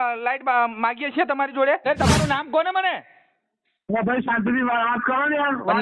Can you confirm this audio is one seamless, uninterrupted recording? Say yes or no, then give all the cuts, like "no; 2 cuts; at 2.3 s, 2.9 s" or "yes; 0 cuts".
no; 1 cut; at 1.9 s